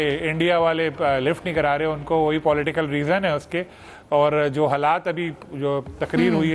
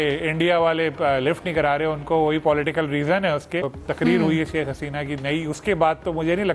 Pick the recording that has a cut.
second; 1 cut; at 3.7 s

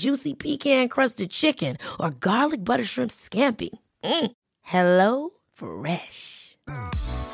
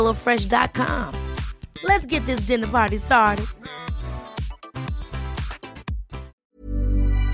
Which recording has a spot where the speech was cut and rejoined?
second; 1 cut; at 6.4 s

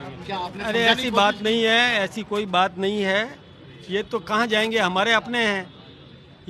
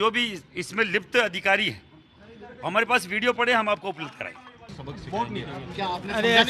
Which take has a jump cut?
second; 1 cut; at 4.6 s

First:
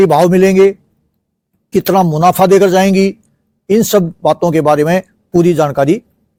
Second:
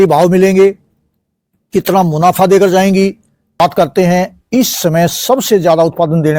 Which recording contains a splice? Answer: second; 1 cut; at 3.6 s

